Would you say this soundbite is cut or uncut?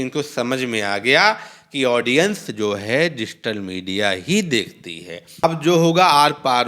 cut